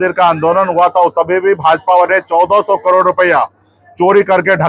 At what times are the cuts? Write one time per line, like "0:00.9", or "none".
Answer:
none